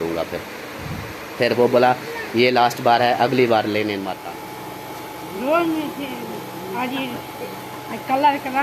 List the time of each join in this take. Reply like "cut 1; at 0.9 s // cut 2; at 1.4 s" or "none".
cut 1; at 4.1 s